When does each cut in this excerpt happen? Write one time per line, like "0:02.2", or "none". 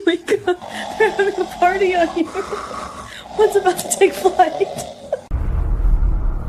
0:05.2